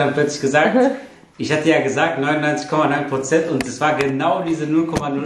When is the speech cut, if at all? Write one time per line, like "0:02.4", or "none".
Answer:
none